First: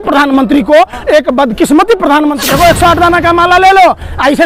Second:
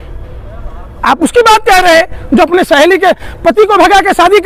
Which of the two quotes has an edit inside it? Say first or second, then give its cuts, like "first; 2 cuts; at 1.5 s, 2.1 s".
first; 1 cut; at 2.4 s